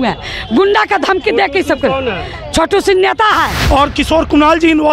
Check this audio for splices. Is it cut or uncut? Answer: cut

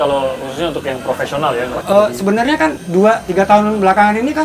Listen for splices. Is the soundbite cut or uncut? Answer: cut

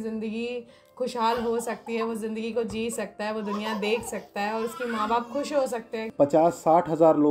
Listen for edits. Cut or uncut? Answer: cut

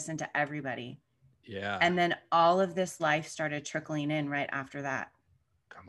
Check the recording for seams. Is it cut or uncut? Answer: uncut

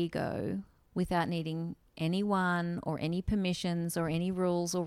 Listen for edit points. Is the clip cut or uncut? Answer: uncut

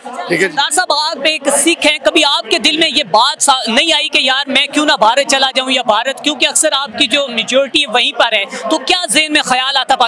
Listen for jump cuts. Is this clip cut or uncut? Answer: uncut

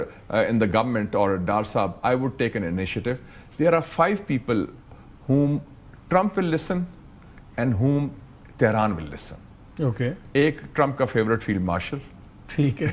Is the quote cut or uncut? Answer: uncut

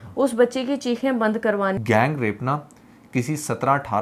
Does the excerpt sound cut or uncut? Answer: cut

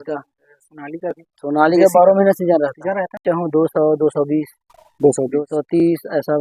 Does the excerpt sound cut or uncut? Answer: cut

